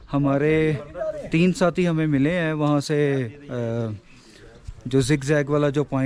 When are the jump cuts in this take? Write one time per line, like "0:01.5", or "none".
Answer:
none